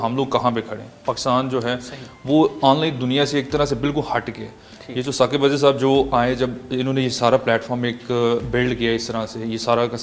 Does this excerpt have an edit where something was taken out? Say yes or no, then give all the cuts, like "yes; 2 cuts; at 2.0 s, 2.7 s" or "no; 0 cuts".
no; 0 cuts